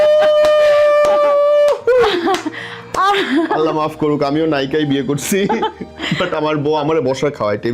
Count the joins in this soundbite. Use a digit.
0